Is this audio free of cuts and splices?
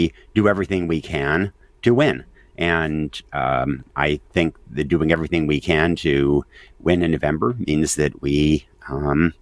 yes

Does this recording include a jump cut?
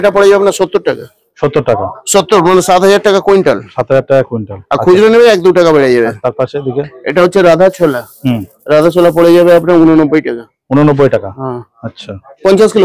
no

